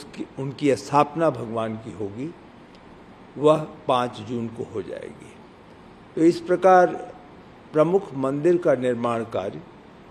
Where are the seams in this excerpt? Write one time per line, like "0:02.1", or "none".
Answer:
none